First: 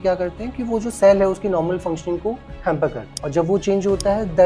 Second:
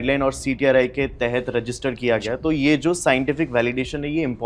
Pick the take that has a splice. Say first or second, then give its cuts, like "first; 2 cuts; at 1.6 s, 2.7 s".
first; 1 cut; at 3.1 s